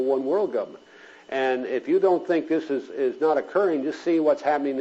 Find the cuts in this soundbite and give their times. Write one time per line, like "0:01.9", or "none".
none